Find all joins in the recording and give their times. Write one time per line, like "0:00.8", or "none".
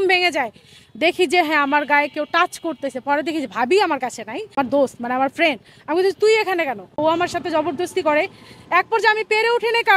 0:04.5
0:07.0